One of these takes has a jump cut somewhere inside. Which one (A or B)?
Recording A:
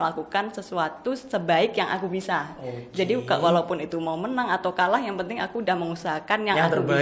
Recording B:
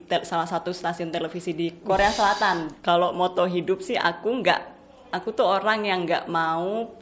B